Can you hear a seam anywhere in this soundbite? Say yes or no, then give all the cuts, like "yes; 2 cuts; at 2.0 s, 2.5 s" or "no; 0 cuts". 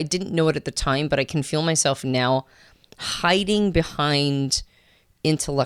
no; 0 cuts